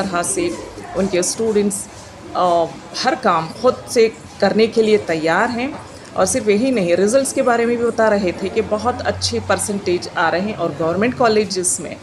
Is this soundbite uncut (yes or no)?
yes